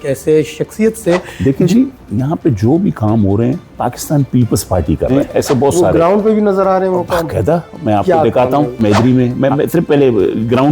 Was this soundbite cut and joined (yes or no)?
yes